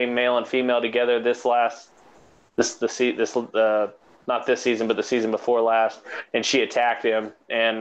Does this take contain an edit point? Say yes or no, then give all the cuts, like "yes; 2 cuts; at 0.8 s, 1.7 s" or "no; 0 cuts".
no; 0 cuts